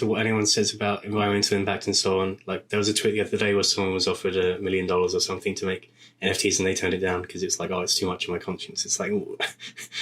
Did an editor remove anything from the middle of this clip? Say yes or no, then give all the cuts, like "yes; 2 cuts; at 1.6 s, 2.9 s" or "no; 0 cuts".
yes; 1 cut; at 1.0 s